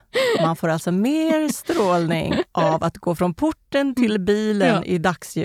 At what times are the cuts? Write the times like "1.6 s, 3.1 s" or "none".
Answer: none